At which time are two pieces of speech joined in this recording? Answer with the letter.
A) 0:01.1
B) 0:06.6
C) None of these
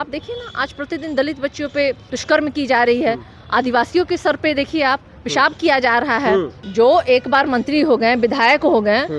B